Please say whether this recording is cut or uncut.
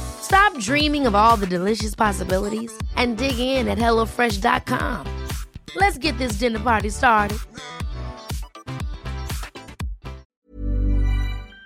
cut